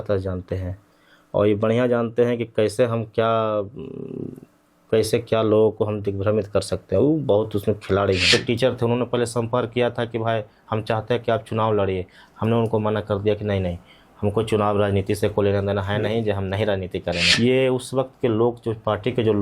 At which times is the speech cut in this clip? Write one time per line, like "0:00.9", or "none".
0:08.3
0:17.3